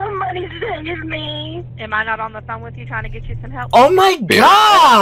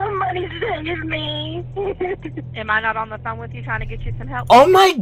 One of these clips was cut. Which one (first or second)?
first